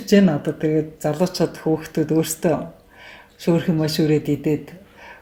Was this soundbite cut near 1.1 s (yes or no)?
no